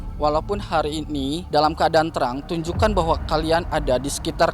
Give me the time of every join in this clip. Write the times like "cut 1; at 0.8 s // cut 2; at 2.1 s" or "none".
cut 1; at 1.4 s